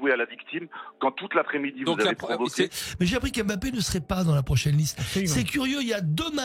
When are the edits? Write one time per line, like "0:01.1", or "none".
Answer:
0:02.8